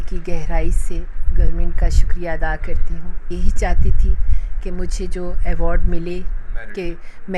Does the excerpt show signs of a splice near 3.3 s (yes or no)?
yes